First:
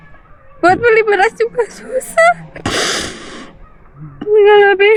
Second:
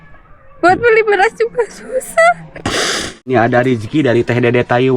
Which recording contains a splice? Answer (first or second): second